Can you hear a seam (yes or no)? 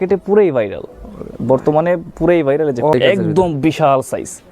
yes